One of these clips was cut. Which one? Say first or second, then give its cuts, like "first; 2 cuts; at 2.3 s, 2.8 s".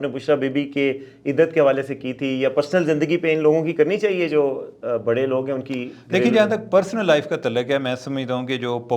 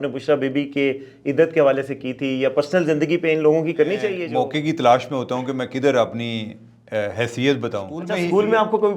second; 2 cuts; at 4.2 s, 8.0 s